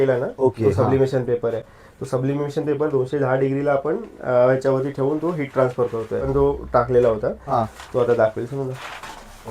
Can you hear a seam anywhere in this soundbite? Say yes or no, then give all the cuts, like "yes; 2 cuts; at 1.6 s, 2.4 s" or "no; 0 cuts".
yes; 1 cut; at 6.3 s